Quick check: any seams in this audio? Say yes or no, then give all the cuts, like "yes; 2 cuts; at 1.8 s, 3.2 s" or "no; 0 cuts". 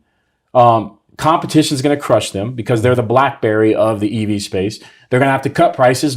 no; 0 cuts